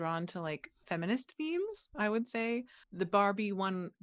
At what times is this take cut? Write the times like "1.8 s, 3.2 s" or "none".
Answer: 0.8 s, 2.8 s